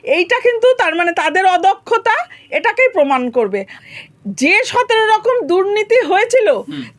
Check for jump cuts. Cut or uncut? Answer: cut